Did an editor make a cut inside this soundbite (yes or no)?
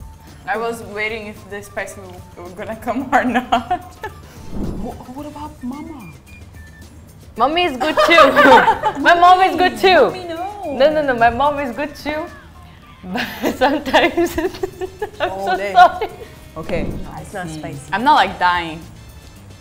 yes